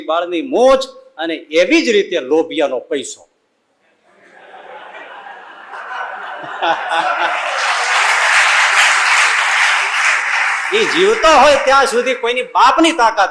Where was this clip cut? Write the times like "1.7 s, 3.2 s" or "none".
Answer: none

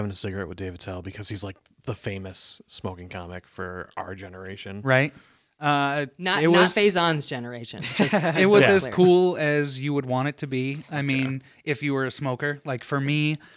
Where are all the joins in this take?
none

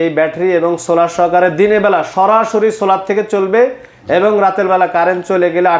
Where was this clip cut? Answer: none

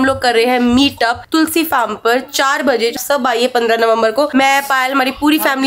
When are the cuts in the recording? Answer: 3.0 s

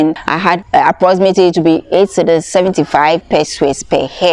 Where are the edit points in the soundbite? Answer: none

